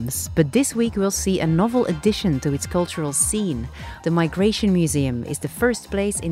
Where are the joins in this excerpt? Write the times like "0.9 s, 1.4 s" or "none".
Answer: 3.9 s

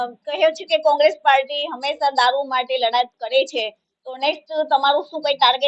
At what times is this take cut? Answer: none

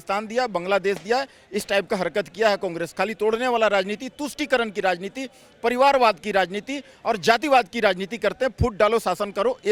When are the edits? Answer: none

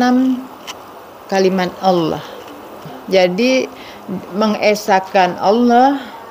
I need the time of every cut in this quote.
2.9 s

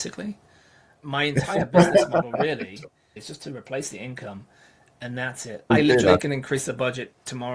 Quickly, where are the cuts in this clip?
0.9 s, 3.2 s, 5.7 s

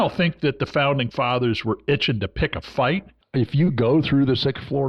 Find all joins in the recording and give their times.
3.2 s

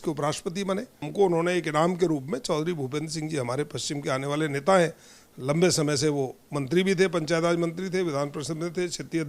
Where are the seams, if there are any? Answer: 1.0 s

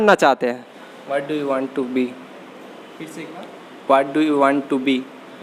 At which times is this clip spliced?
none

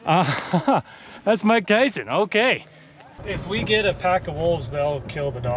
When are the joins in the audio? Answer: 3.1 s

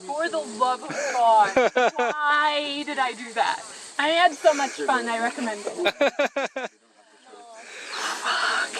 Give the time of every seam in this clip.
none

